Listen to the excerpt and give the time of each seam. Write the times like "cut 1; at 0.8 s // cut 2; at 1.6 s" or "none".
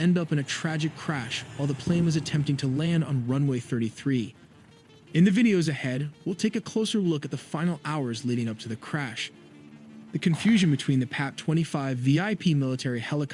none